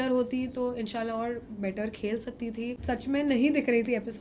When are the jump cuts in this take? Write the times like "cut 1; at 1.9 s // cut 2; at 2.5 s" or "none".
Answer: cut 1; at 2.8 s